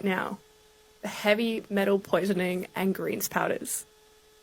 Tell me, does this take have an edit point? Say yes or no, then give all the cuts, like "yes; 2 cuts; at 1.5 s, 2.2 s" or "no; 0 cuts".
no; 0 cuts